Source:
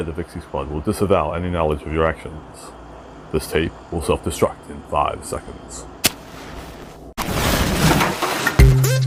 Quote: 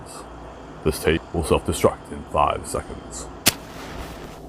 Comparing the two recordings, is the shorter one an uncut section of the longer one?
no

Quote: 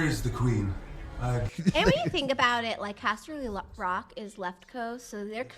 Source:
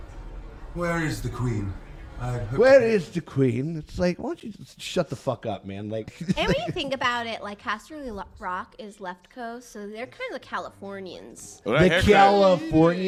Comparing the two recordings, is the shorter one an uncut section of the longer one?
no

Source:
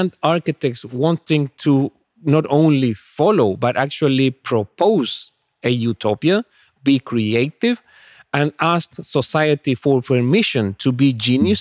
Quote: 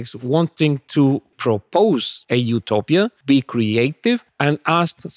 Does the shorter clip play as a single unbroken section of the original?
no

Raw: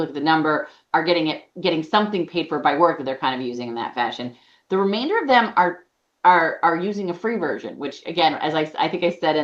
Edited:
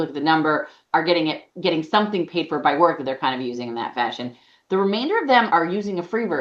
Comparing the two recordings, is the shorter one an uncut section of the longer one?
no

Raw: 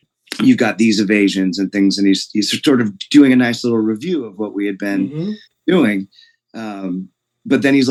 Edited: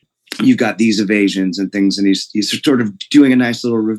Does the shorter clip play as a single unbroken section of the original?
yes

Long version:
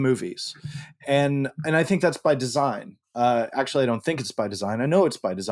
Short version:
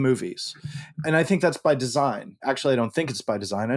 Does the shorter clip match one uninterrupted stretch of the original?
no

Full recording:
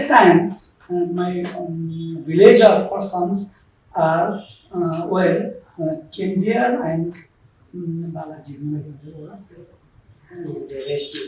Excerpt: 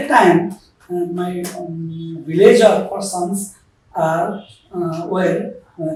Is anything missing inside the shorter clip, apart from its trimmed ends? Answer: no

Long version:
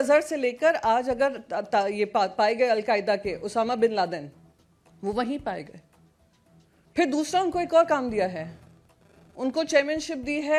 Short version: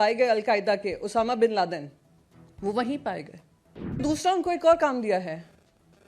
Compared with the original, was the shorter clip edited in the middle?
yes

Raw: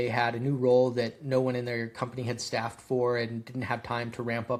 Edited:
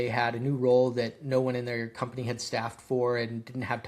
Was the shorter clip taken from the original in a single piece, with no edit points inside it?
yes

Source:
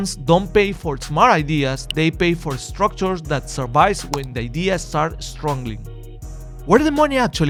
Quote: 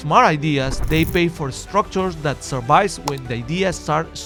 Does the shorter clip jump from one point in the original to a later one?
no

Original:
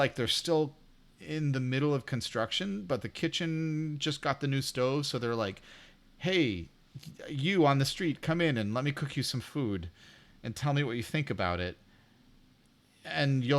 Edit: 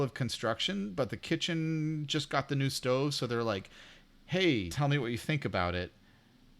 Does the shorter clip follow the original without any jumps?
no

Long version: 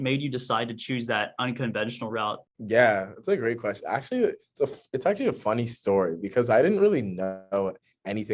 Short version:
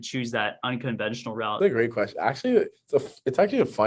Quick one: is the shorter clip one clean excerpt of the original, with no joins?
no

